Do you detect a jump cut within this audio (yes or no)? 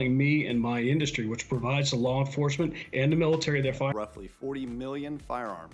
yes